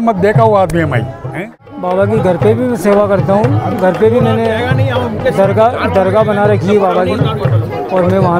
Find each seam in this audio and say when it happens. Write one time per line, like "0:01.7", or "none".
0:01.7